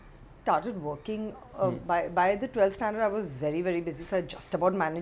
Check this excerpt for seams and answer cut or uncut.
uncut